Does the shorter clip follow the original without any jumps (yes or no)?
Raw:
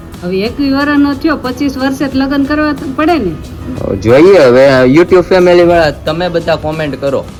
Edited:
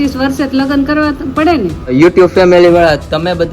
no